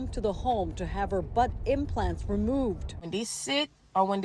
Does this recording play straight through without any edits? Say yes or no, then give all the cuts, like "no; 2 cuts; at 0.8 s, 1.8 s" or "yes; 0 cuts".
no; 1 cut; at 3.0 s